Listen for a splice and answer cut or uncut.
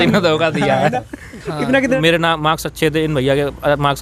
cut